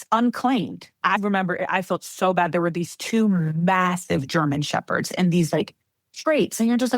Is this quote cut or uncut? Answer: cut